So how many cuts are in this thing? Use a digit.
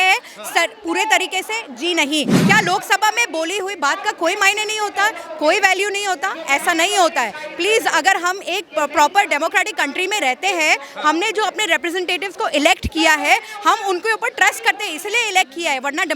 1